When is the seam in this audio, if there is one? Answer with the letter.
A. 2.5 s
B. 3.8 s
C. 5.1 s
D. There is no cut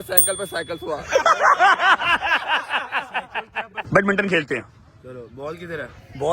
B